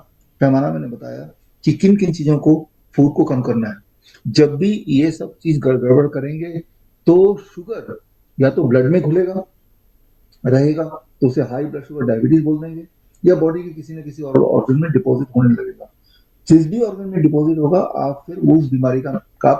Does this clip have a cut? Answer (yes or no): no